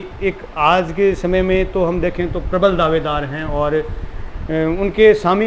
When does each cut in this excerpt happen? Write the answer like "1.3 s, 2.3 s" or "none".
none